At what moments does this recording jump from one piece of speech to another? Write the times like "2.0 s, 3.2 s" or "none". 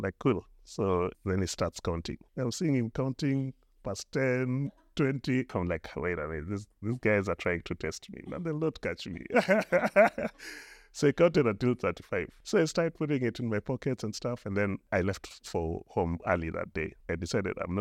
1.2 s, 2.2 s, 5.5 s, 12.4 s, 14.9 s, 15.8 s, 17.0 s